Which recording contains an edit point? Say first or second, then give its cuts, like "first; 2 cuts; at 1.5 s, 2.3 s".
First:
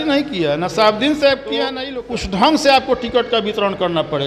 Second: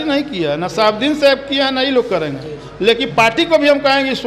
first; 1 cut; at 1.8 s